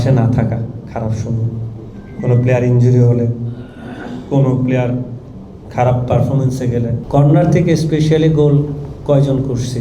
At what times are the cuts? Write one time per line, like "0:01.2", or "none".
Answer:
0:07.0